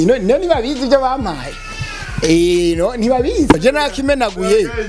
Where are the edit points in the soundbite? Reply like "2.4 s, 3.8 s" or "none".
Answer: 3.6 s